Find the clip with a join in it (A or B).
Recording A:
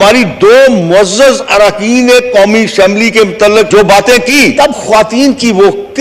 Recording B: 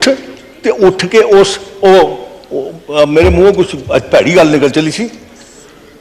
A